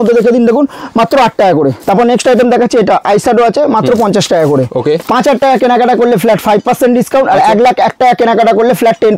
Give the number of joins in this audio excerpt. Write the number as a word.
two